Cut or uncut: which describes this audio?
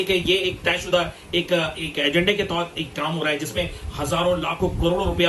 uncut